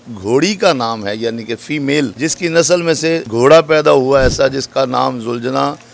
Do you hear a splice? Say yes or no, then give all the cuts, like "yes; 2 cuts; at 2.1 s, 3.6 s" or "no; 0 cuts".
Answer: yes; 2 cuts; at 2.1 s, 3.3 s